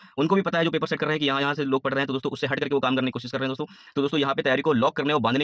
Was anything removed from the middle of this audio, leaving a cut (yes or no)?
no